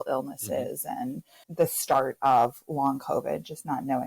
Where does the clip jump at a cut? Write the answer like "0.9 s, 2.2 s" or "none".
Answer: 1.5 s